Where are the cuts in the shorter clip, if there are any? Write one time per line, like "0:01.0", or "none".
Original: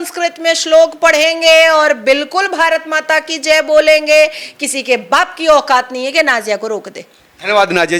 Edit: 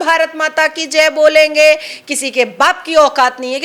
none